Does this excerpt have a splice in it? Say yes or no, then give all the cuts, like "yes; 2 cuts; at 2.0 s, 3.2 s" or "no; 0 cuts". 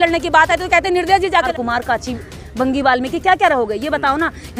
yes; 1 cut; at 1.5 s